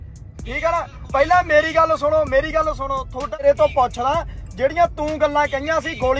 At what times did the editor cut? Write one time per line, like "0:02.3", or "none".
0:03.4